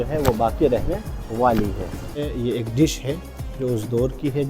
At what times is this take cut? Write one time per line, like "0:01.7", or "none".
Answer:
0:02.2

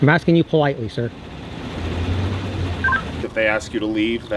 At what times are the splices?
0:02.1
0:03.2

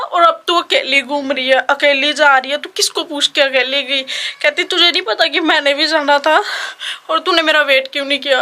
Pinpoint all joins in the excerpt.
none

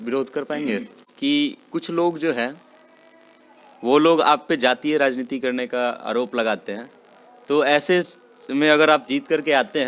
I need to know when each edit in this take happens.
0:01.0

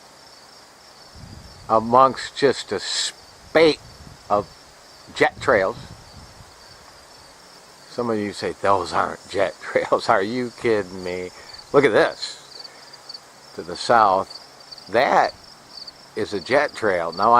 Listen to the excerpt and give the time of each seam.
0:09.2

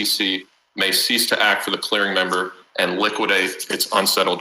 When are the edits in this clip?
none

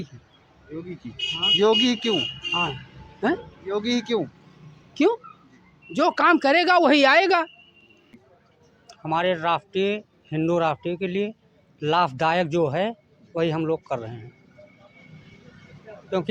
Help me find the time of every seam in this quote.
0:08.0

